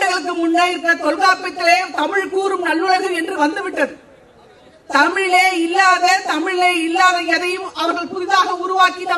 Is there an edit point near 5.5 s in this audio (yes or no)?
no